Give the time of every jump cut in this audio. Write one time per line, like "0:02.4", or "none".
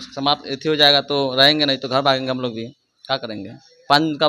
none